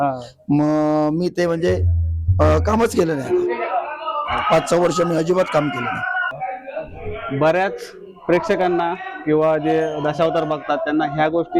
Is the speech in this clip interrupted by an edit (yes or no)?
yes